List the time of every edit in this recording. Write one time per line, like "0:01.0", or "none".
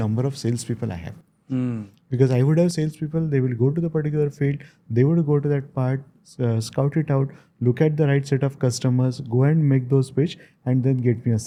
none